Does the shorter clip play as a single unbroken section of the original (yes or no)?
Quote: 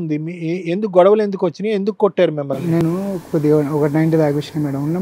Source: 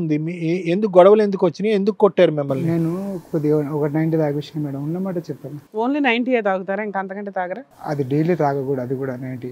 yes